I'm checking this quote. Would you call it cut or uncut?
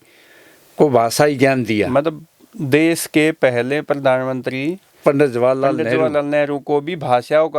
uncut